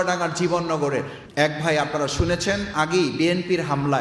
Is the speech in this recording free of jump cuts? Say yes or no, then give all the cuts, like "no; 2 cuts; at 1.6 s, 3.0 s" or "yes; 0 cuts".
no; 1 cut; at 1.2 s